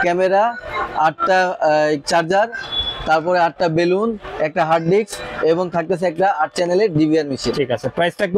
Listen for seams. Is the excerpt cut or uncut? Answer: uncut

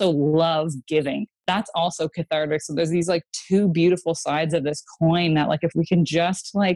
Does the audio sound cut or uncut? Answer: uncut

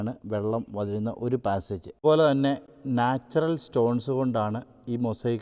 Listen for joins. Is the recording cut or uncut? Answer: cut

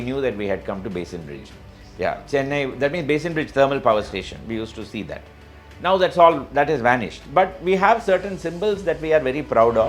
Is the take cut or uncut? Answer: uncut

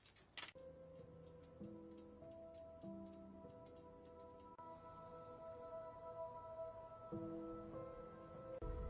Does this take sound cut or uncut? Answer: uncut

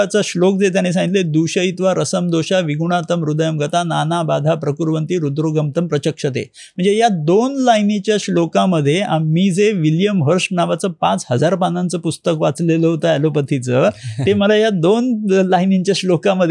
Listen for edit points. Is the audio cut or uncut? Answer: uncut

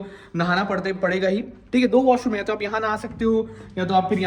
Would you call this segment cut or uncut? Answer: uncut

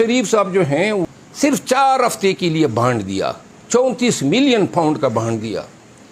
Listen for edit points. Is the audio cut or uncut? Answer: cut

